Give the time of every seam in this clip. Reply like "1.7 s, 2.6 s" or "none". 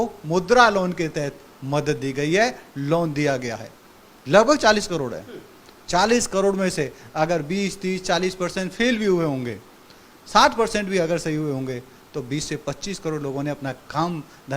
none